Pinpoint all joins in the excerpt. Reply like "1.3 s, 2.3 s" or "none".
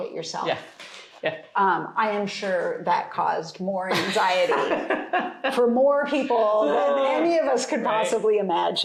none